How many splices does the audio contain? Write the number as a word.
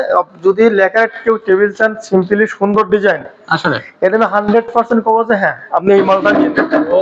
zero